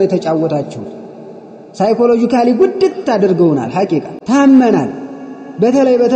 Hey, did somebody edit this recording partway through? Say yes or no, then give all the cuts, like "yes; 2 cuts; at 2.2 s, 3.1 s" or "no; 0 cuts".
yes; 1 cut; at 4.2 s